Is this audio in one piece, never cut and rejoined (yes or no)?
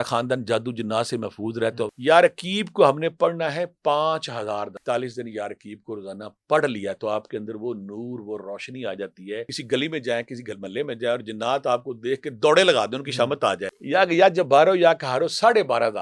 no